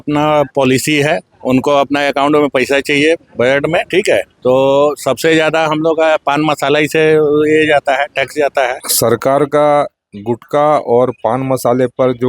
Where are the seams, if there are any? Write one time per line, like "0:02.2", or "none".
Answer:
0:01.3
0:04.3
0:08.9